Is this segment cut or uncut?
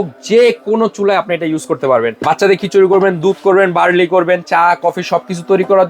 cut